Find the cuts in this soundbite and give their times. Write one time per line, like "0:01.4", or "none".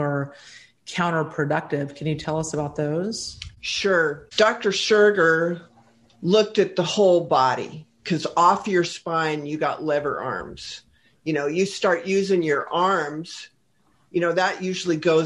none